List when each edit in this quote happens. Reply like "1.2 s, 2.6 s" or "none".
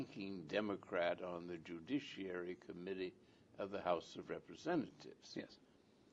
1.0 s